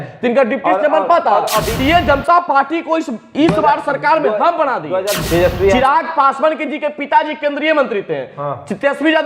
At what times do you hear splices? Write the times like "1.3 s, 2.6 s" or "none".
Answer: 1.7 s, 5.2 s